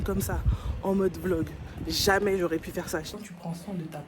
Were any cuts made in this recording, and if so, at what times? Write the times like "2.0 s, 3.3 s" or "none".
3.1 s